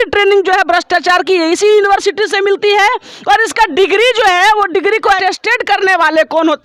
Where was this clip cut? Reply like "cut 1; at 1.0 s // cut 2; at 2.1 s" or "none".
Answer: cut 1; at 5.2 s